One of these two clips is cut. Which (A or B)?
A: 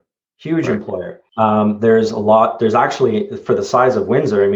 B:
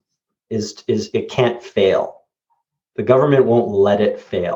A